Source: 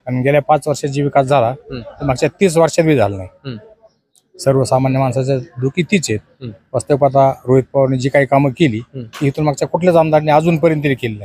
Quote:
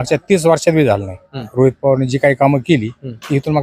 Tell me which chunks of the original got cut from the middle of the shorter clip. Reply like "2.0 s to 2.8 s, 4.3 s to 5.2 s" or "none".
3.6 s to 7.4 s